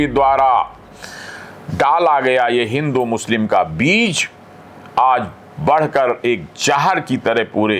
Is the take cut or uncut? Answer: uncut